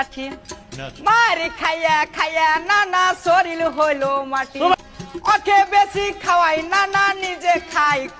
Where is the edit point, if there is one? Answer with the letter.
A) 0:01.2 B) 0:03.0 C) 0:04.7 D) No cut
C